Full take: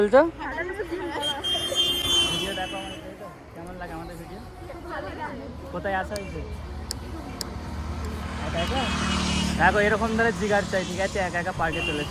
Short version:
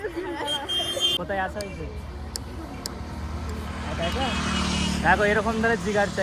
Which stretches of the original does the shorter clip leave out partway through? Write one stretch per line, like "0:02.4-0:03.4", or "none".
0:01.9-0:05.7